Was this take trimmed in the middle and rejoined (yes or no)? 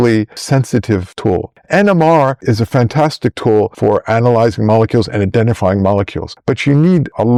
no